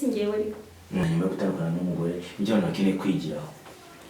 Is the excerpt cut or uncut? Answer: cut